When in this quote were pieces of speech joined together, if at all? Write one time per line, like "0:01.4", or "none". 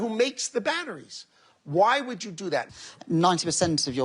0:02.7